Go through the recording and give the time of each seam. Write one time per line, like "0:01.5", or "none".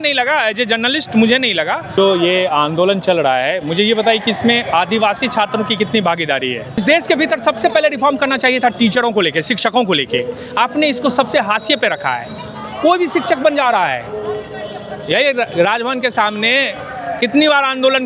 0:01.9
0:06.8